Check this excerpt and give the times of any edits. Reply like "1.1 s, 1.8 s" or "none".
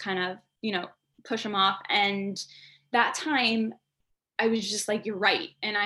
none